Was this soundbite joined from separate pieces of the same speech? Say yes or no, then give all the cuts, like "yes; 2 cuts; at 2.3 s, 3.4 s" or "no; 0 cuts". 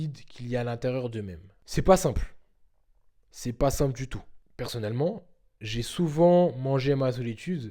no; 0 cuts